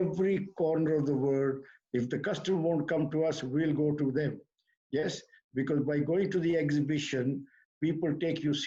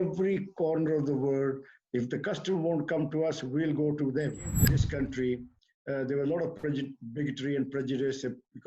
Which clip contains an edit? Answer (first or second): second